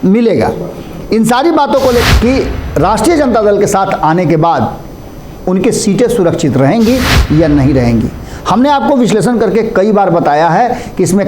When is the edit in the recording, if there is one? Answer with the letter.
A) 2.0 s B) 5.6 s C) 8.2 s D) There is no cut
A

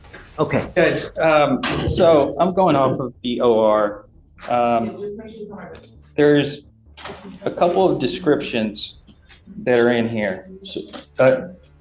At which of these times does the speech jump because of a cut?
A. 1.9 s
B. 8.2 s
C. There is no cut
B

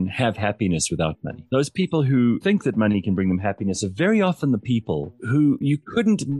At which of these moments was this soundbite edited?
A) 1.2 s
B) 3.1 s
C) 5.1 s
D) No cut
C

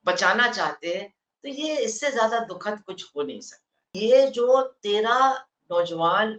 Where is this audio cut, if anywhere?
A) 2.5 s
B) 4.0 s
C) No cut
B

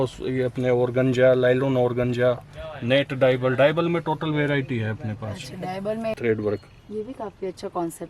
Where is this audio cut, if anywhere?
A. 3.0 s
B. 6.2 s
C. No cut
B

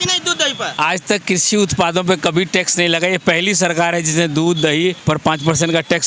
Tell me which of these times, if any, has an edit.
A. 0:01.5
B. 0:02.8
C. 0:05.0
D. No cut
C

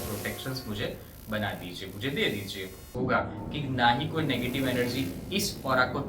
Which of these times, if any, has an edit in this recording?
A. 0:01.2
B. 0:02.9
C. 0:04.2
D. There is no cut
B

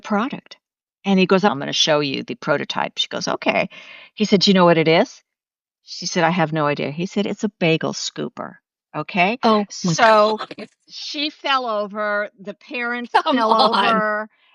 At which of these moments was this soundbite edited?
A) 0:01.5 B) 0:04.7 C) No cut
A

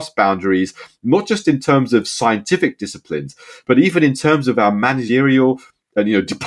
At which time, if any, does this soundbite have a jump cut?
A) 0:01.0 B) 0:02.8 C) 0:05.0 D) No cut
C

